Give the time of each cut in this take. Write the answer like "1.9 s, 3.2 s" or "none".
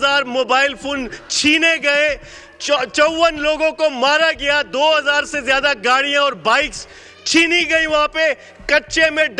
none